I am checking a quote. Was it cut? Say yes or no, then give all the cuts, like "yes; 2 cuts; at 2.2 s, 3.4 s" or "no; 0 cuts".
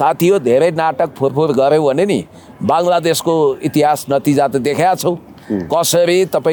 no; 0 cuts